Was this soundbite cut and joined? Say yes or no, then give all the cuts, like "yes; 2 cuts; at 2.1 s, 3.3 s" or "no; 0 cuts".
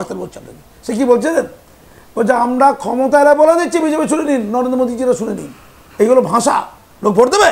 no; 0 cuts